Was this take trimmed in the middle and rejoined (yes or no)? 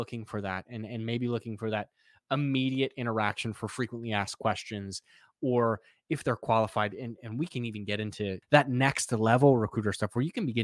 yes